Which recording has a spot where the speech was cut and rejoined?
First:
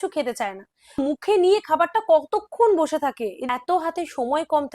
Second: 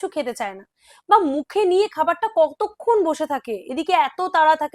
first; 2 cuts; at 1.0 s, 3.3 s

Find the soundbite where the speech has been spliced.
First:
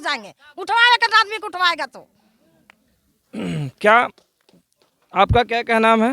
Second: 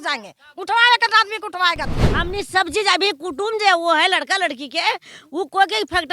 second; 1 cut; at 2.0 s

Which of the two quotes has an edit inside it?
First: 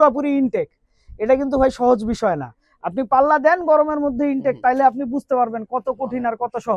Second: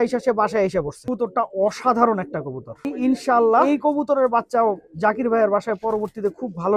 second; 3 cuts; at 1.0 s, 2.9 s, 3.6 s

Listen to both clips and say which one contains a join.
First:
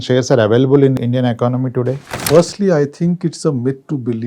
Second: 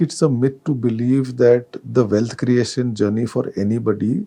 first; 2 cuts; at 1.0 s, 2.1 s

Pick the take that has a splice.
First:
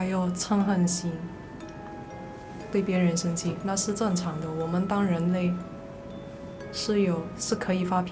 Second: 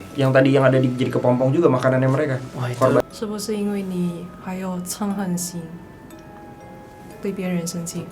second; 1 cut; at 3.0 s

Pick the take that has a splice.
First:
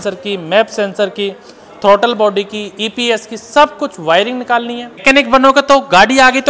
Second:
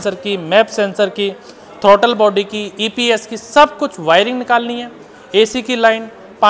first; 1 cut; at 4.9 s

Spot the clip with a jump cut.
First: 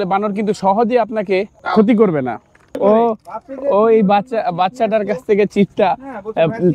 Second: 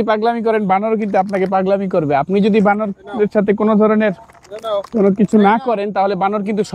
first; 2 cuts; at 1.6 s, 2.8 s

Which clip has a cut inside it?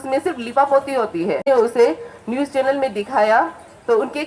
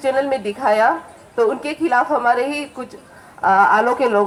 first; 1 cut; at 1.4 s

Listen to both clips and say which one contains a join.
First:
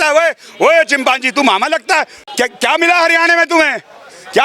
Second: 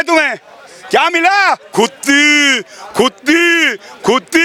first; 1 cut; at 2.2 s

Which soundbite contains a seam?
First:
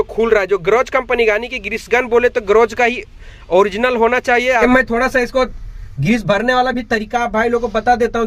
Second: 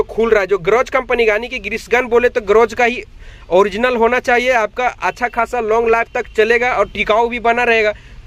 first; 1 cut; at 4.6 s

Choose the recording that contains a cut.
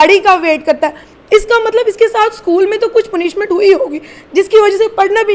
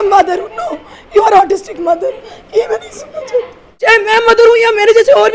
second; 1 cut; at 3.7 s

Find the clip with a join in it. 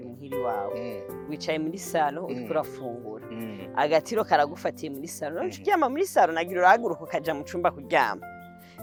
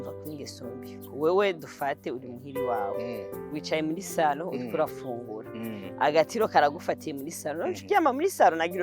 second; 1 cut; at 1.0 s

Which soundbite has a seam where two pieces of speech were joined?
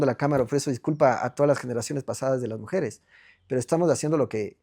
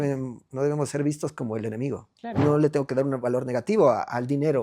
second; 1 cut; at 2.4 s

